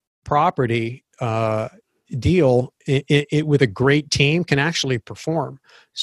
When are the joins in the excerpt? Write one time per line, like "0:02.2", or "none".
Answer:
none